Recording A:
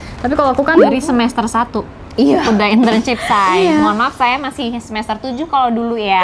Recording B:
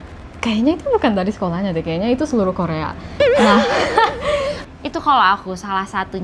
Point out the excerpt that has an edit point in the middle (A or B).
B